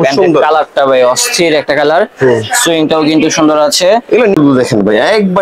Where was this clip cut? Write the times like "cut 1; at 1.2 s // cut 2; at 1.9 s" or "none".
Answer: cut 1; at 4.3 s